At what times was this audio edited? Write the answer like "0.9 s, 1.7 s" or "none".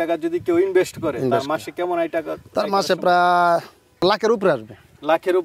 4.0 s